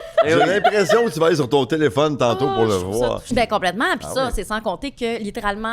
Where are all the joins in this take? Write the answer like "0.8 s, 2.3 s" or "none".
3.2 s